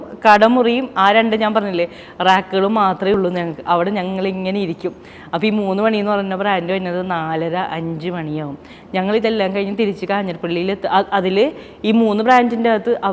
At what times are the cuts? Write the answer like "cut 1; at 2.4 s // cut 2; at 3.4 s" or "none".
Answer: none

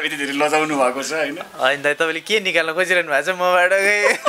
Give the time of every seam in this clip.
none

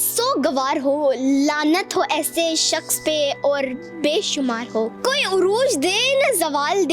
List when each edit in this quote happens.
cut 1; at 5.0 s

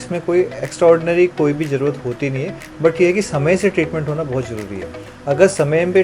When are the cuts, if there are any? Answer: none

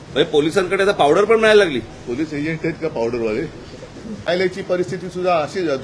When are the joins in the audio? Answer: cut 1; at 4.3 s

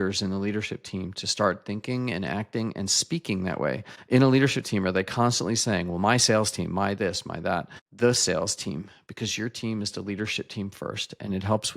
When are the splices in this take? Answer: cut 1; at 3.9 s // cut 2; at 7.8 s

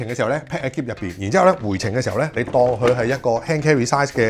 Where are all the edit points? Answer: none

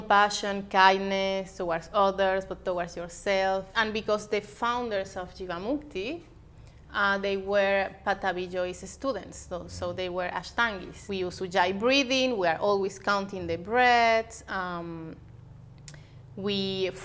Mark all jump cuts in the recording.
cut 1; at 3.7 s // cut 2; at 10.9 s

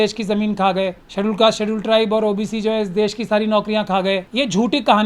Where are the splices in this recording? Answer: cut 1; at 1.0 s // cut 2; at 4.3 s

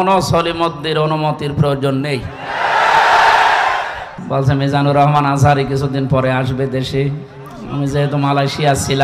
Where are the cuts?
cut 1; at 4.1 s

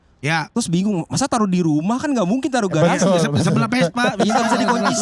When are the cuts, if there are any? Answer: none

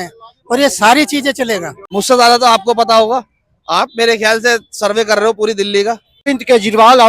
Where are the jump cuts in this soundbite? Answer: cut 1; at 1.8 s // cut 2; at 6.2 s

